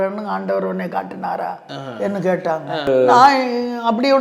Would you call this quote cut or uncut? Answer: cut